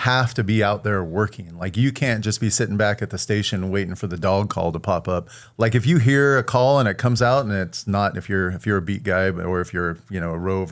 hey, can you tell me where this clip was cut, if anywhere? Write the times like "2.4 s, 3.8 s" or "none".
5.4 s